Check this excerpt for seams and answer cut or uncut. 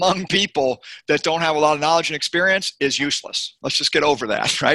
uncut